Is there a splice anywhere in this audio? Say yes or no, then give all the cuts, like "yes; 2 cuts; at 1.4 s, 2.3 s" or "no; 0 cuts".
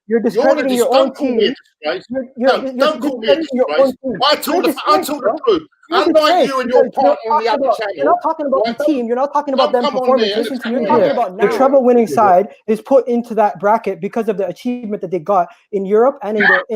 yes; 1 cut; at 11.0 s